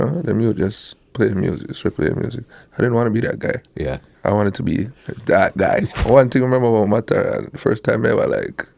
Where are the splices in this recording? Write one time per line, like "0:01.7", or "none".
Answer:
0:04.1
0:05.9